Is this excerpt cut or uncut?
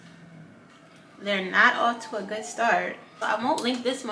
uncut